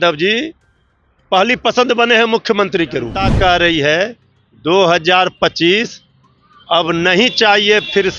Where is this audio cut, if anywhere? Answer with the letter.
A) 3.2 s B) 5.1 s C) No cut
A